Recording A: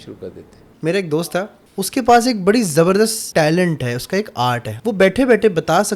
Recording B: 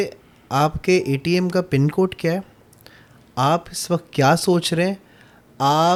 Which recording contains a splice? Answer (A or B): A